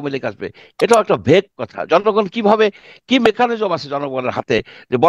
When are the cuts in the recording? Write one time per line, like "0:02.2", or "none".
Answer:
none